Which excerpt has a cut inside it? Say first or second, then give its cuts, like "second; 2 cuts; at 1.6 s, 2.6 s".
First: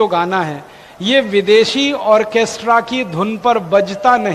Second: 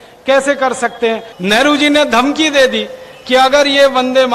second; 1 cut; at 1.3 s